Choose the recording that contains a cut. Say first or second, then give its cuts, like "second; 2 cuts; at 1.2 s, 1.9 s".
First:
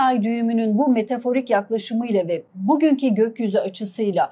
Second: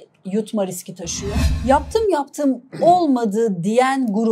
second; 1 cut; at 1.5 s